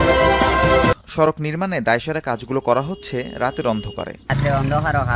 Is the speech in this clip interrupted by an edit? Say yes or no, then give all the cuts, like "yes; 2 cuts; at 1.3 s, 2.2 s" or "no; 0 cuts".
yes; 2 cuts; at 1.1 s, 4.3 s